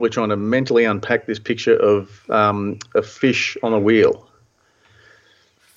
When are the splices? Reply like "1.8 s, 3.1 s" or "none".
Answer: none